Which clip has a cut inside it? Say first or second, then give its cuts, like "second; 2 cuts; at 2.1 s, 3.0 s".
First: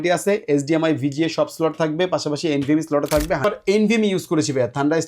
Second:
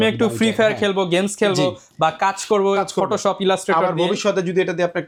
first; 1 cut; at 3.4 s